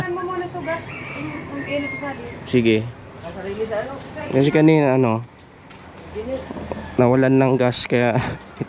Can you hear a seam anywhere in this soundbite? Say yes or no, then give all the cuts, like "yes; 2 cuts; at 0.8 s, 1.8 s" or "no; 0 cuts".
no; 0 cuts